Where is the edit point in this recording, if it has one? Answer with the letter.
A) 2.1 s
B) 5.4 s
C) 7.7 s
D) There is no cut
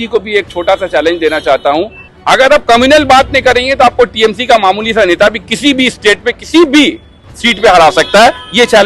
A